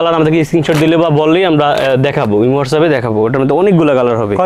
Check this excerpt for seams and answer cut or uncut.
uncut